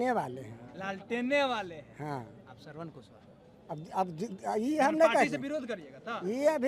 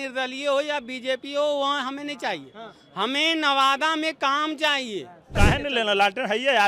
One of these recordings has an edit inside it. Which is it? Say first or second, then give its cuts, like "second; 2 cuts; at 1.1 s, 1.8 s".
second; 1 cut; at 5.2 s